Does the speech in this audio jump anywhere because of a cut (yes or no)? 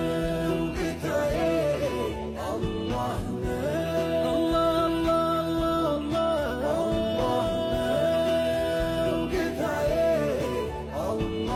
no